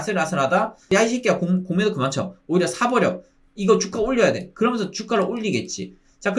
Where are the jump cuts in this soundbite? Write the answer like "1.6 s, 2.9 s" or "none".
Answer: 0.9 s